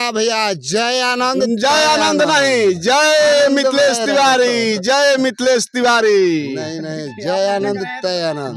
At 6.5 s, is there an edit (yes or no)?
no